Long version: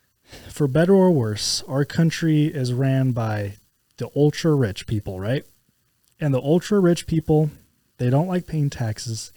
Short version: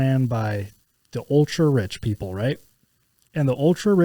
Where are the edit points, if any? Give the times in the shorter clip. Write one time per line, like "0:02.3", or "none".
none